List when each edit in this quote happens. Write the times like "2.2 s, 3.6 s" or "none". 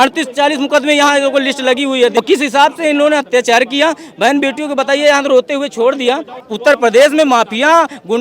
2.2 s, 6.4 s